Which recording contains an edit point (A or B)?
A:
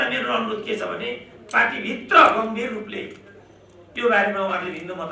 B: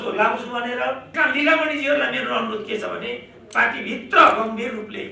B